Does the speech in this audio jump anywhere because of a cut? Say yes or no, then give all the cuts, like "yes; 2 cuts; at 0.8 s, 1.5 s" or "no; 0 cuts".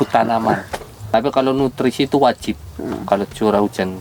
yes; 1 cut; at 1.1 s